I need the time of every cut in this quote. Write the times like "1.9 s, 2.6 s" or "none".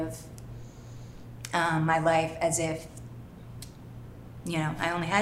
none